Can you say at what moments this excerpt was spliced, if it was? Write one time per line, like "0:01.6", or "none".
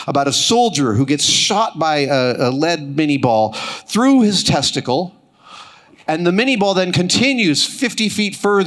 none

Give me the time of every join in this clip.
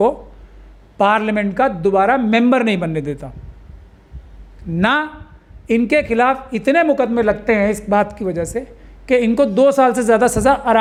none

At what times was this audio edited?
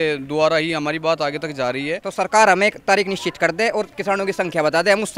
0:02.0

